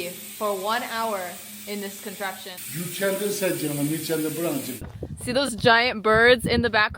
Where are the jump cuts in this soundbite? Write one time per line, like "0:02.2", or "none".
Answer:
0:02.5
0:04.7